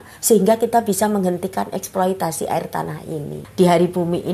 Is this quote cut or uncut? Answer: cut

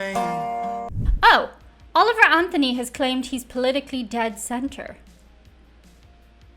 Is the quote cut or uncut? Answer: cut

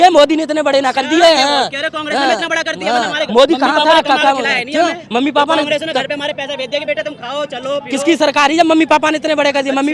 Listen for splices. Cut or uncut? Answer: uncut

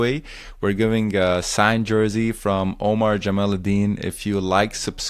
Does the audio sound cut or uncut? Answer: uncut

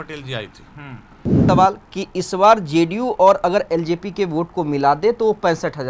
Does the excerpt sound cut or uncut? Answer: cut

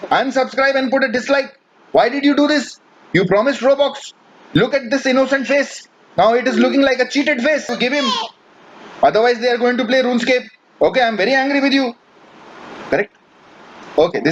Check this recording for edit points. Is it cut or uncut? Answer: cut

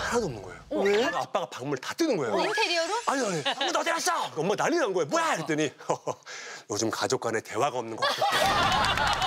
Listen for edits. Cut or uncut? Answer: cut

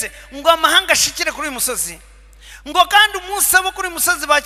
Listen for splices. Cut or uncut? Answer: uncut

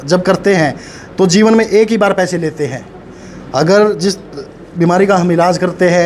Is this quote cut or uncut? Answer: uncut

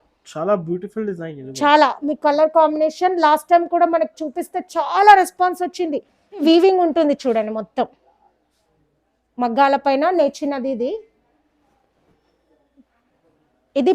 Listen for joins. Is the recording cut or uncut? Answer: cut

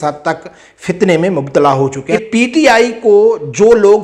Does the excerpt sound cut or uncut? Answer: cut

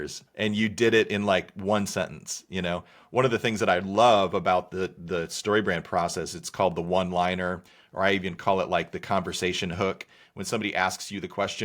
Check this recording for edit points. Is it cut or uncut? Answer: uncut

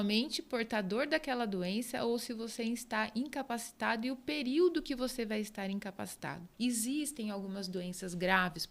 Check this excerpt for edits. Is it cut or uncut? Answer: cut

